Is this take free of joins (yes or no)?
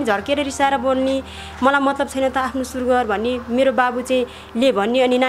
yes